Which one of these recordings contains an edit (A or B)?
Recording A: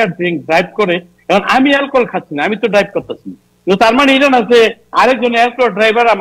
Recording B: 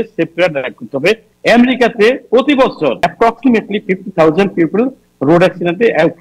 B